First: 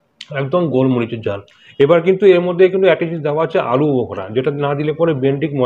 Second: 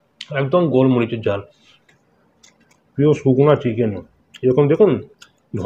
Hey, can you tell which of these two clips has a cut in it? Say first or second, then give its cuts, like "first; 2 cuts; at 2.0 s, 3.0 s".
second; 1 cut; at 1.7 s